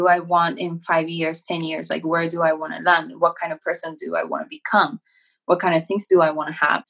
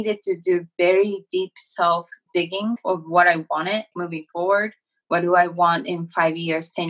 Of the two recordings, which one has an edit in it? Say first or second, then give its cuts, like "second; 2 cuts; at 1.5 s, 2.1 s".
second; 2 cuts; at 2.7 s, 4.0 s